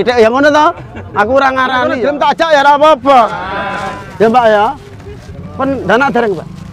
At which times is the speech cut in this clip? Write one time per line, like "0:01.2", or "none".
0:01.9